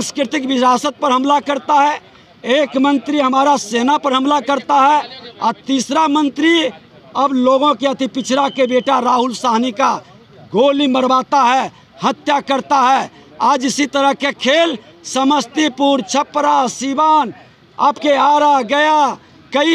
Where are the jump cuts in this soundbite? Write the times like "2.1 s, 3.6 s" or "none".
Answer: none